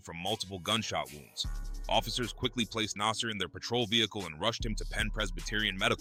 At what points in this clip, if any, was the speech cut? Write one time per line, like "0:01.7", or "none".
none